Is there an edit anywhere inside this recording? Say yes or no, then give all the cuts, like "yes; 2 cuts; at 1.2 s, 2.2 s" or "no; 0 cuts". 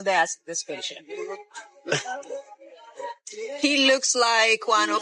no; 0 cuts